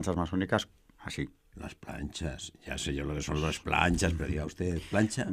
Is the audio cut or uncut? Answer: uncut